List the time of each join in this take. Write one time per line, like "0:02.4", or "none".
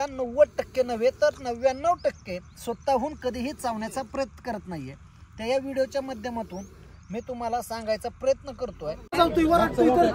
0:09.1